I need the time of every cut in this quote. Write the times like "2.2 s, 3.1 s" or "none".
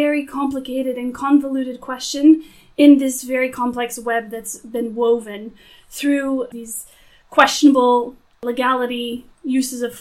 6.5 s, 8.3 s